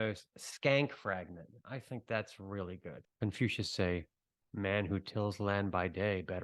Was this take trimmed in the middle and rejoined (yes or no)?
yes